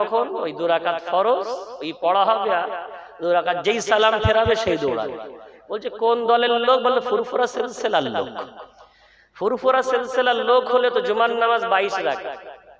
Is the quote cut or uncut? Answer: uncut